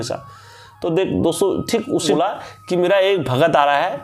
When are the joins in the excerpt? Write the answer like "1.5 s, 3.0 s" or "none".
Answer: 2.1 s